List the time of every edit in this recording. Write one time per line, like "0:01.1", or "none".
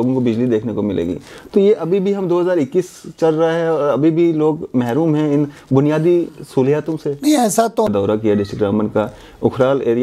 0:07.9